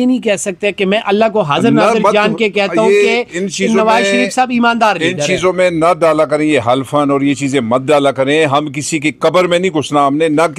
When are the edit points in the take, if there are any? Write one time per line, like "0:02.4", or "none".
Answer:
none